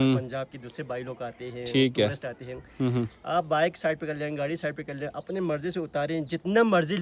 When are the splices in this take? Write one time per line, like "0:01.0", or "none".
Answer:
none